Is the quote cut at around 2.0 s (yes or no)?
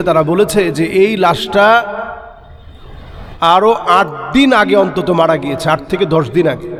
no